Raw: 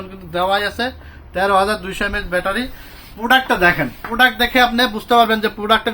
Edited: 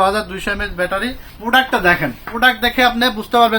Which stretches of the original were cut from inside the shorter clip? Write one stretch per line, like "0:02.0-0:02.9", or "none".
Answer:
0:02.8-0:03.0